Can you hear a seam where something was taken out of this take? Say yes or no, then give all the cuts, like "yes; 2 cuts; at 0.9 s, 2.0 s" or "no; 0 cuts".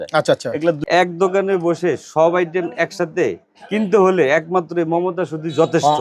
yes; 1 cut; at 1.0 s